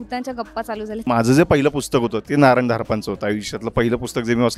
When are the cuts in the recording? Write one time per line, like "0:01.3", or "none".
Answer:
0:01.1